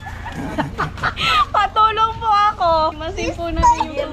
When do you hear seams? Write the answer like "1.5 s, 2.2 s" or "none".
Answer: 3.0 s